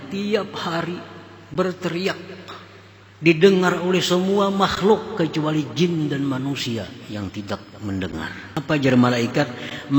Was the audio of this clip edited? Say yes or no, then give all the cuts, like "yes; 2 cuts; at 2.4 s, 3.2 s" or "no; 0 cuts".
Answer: yes; 1 cut; at 8.5 s